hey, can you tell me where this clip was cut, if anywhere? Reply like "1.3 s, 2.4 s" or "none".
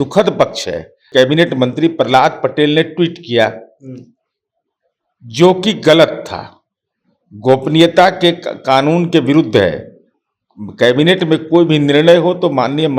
1.0 s